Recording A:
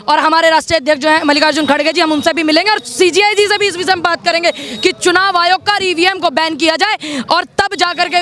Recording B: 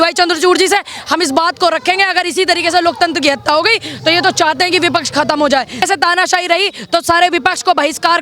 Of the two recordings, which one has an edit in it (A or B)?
B